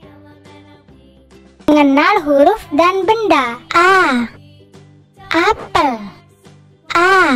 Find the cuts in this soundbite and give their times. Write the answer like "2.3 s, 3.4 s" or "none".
1.6 s